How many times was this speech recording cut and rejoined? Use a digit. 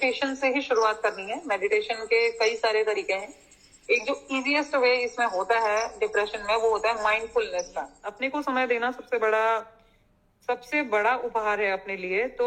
1